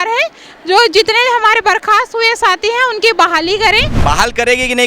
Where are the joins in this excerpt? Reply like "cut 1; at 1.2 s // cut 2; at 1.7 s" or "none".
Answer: cut 1; at 3.9 s